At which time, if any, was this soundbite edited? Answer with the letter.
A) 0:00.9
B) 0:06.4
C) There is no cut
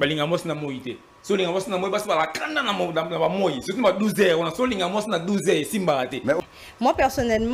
B